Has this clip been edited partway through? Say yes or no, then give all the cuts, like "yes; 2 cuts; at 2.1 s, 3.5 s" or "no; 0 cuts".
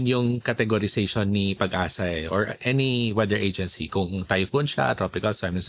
no; 0 cuts